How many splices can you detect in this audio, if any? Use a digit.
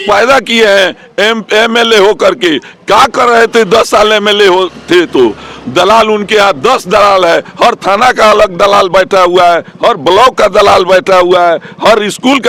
0